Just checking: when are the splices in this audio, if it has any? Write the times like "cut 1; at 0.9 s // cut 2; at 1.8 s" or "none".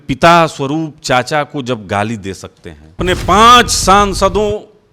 cut 1; at 3.0 s